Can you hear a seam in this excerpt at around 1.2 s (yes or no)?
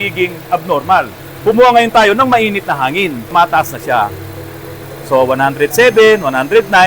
yes